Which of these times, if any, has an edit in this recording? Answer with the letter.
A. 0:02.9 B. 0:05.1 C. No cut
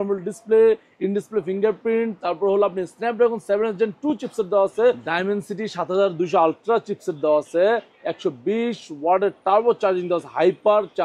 B